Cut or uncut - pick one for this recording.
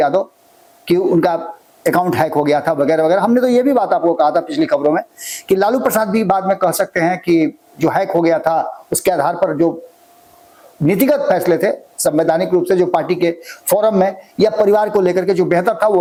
uncut